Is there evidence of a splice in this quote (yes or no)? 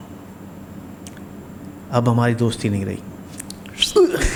no